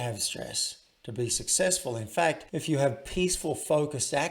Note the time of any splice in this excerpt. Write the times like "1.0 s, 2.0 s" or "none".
2.4 s